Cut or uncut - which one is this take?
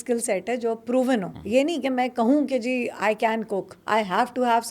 cut